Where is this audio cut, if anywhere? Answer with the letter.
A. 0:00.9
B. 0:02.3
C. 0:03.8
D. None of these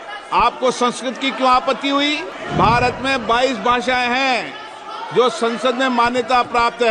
B